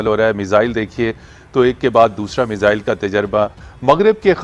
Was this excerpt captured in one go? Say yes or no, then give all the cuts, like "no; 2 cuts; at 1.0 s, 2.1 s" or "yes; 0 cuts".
yes; 0 cuts